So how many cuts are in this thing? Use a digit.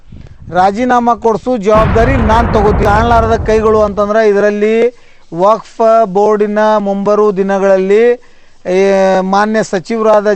1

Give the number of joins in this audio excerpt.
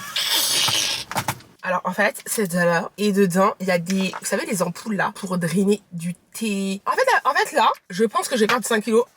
2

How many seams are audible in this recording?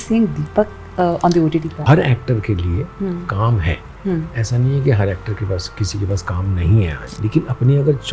2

